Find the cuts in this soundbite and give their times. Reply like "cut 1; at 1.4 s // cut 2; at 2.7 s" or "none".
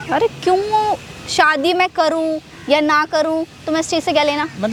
none